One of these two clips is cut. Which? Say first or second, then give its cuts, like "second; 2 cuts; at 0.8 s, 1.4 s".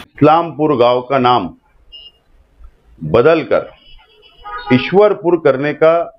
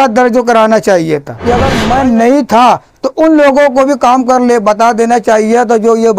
second; 1 cut; at 1.3 s